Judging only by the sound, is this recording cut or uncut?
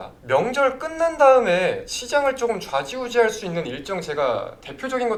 uncut